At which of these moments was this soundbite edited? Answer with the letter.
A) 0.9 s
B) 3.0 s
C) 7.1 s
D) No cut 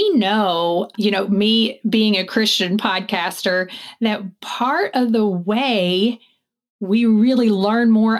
A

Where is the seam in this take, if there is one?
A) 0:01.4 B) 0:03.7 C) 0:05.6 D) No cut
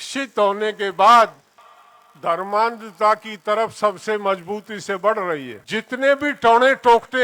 C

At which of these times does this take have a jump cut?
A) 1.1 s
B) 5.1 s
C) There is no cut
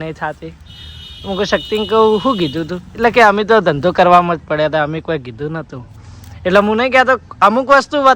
C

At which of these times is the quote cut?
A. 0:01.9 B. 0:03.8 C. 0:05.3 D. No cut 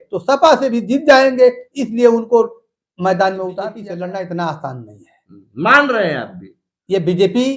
B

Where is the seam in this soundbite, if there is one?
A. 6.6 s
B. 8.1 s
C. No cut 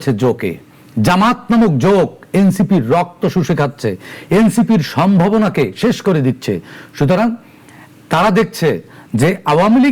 C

